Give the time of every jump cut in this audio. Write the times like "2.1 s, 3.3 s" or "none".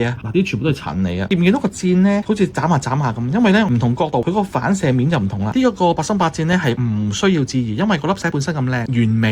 5.5 s